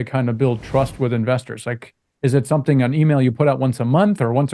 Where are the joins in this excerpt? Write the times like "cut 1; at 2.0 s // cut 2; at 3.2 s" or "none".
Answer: none